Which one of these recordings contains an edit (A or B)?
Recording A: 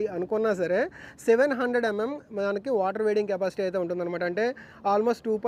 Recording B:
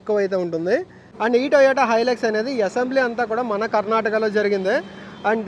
B